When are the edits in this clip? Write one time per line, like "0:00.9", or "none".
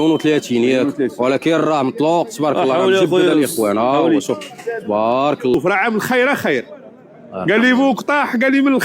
0:05.5

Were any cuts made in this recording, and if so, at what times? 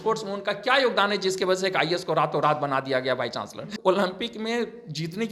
0:03.7

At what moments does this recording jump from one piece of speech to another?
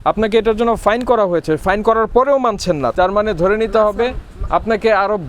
0:01.6
0:02.9

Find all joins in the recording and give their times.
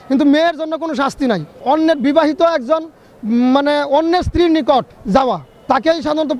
0:01.5
0:05.1

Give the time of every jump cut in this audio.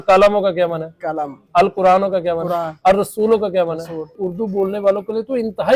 0:04.2

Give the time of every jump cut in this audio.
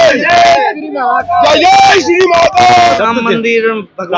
0:02.8

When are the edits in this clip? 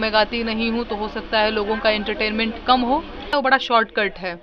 0:03.3

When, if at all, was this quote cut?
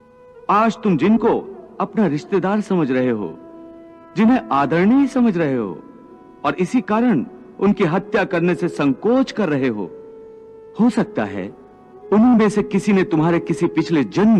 none

